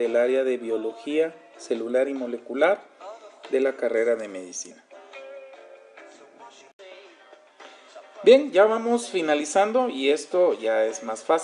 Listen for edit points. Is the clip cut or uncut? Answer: uncut